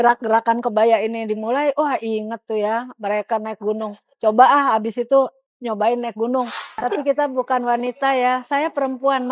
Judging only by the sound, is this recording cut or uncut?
cut